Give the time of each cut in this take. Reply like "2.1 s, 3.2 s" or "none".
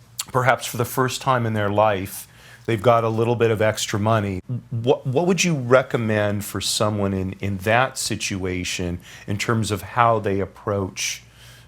4.4 s